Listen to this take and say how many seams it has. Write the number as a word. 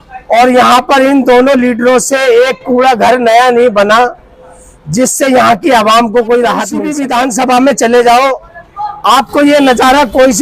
one